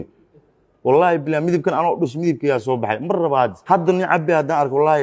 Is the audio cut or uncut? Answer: uncut